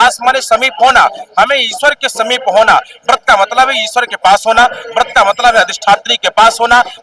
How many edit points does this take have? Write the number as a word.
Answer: zero